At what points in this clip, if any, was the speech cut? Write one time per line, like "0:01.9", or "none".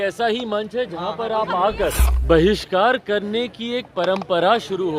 0:02.1